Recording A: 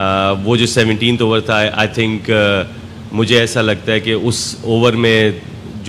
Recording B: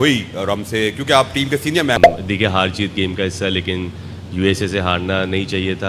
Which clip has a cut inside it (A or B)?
B